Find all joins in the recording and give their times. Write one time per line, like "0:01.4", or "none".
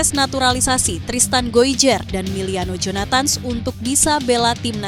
none